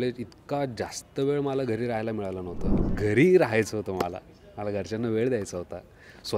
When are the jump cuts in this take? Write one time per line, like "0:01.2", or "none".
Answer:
0:02.7